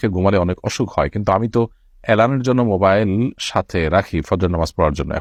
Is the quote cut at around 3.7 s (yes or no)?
no